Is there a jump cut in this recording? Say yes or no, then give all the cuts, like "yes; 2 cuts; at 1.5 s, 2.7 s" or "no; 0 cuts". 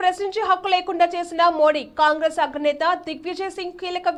no; 0 cuts